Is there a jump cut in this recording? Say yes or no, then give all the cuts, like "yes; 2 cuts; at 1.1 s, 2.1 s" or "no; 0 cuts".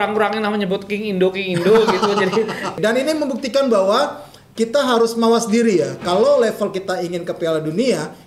yes; 1 cut; at 2.7 s